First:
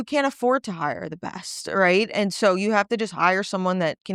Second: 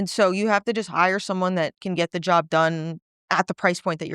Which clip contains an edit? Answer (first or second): second